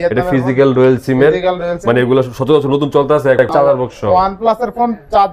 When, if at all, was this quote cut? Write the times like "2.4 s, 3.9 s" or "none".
3.5 s

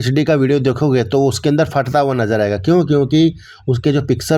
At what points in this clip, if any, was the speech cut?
none

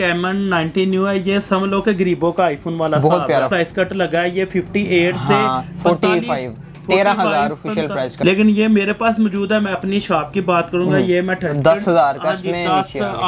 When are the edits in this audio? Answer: 3.5 s, 8.1 s, 11.5 s

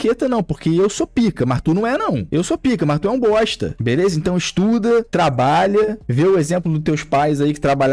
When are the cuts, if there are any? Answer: none

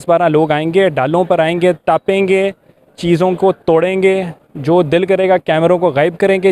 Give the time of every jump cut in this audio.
none

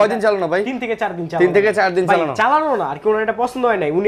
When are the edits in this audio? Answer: none

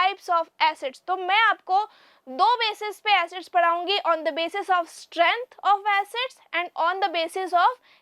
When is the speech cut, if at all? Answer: none

